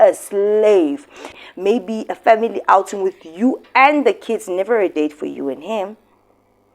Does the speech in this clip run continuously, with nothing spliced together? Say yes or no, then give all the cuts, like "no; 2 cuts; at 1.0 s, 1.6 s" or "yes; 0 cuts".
no; 1 cut; at 1.4 s